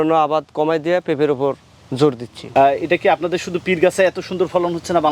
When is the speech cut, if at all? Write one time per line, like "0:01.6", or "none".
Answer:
none